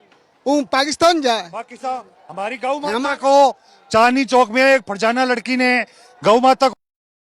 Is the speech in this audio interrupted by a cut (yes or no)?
no